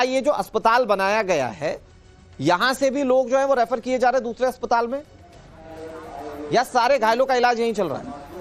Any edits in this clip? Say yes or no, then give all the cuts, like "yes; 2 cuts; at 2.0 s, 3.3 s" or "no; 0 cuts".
no; 0 cuts